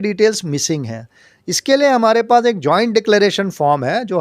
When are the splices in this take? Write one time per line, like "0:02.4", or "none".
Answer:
none